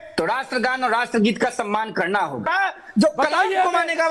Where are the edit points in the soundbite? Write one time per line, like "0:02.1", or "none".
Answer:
0:02.5